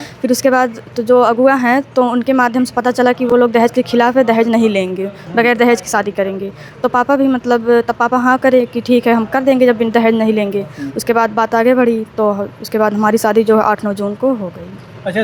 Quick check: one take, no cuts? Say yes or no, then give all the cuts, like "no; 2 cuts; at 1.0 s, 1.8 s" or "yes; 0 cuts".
yes; 0 cuts